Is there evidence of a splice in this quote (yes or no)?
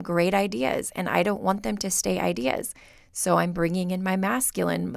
no